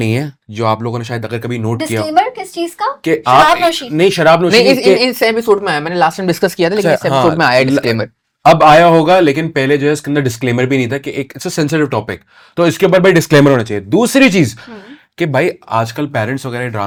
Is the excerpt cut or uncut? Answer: uncut